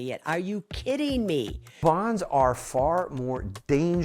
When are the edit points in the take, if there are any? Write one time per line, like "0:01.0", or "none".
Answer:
0:01.7